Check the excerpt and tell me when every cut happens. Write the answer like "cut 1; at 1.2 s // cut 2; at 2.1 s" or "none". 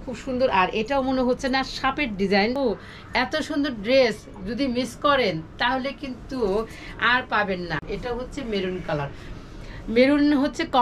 cut 1; at 2.6 s // cut 2; at 7.9 s

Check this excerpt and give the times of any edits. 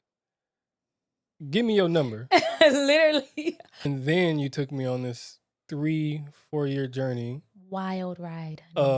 cut 1; at 3.7 s

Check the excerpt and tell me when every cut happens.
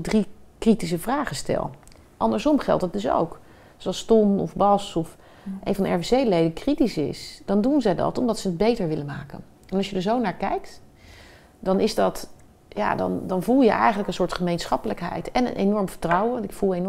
none

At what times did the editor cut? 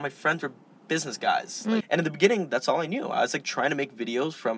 cut 1; at 1.9 s

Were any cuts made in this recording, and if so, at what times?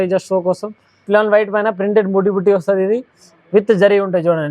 cut 1; at 1.0 s

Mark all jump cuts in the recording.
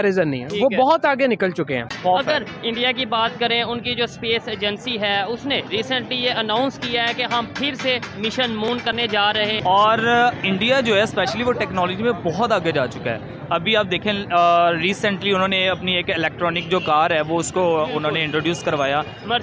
cut 1; at 1.9 s // cut 2; at 9.6 s

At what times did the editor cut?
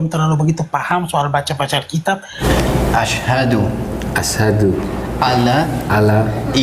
cut 1; at 2.4 s

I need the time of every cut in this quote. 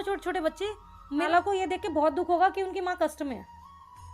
cut 1; at 1.3 s

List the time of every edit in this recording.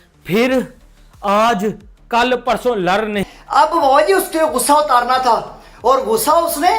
cut 1; at 3.2 s

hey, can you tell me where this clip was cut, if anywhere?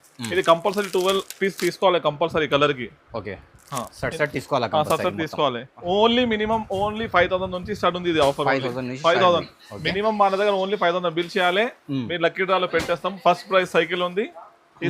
cut 1; at 5.7 s

